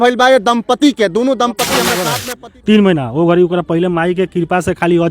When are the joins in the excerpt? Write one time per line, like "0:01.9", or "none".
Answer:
0:02.1